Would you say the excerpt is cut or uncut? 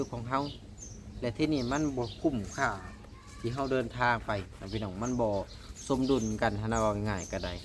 uncut